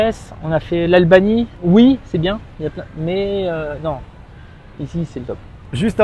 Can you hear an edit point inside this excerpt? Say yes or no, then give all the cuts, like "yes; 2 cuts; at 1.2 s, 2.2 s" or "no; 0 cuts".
no; 0 cuts